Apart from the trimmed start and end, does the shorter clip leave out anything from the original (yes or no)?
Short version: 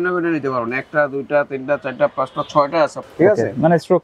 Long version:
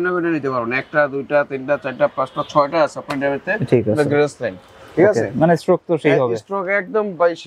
yes